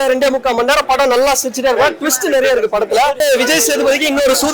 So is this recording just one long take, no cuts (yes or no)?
no